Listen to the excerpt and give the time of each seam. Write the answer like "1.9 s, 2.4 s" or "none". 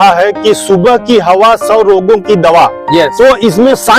none